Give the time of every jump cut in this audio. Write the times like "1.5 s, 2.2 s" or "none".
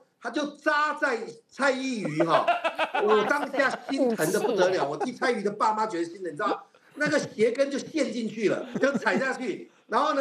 8.7 s